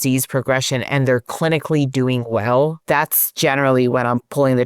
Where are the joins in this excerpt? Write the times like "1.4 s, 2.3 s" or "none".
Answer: 2.8 s

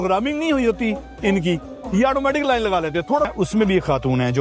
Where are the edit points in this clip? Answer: 3.3 s

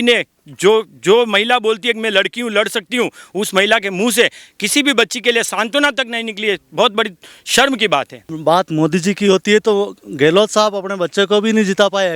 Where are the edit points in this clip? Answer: 8.3 s

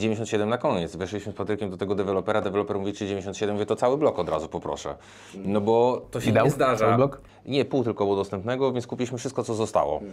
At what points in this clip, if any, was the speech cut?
none

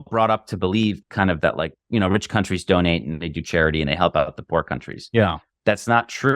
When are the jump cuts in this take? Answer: none

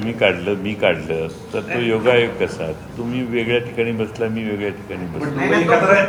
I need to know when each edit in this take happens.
none

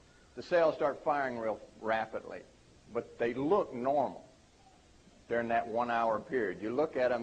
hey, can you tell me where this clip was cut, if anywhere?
5.2 s

